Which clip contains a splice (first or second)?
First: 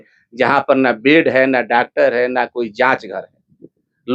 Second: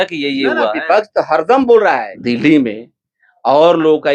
second